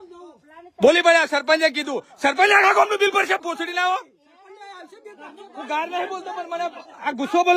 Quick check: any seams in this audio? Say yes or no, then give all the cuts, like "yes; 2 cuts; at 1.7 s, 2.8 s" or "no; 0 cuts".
no; 0 cuts